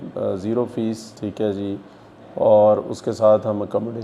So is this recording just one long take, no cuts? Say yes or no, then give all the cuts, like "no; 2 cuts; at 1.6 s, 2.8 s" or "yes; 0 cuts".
yes; 0 cuts